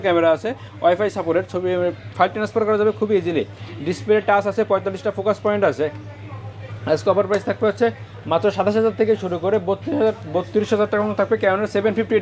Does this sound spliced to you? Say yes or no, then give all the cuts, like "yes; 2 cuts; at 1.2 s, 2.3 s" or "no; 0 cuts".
no; 0 cuts